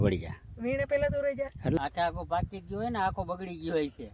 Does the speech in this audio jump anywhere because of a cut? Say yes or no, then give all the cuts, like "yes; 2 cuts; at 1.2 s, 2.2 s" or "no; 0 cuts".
yes; 1 cut; at 1.7 s